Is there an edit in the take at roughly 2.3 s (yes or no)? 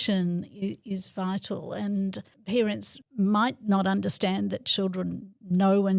yes